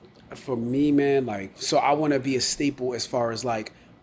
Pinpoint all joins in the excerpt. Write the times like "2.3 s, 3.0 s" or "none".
1.6 s